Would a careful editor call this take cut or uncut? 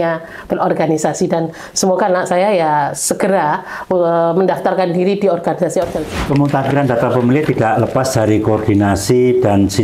cut